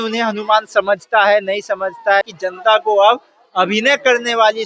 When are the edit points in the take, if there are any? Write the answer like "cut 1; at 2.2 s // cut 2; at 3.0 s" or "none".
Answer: cut 1; at 2.2 s